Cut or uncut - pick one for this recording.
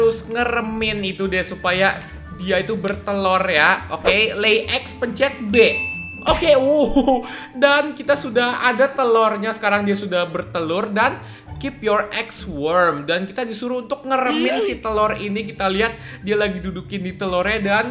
uncut